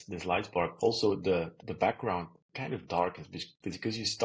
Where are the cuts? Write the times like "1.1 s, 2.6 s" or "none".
1.6 s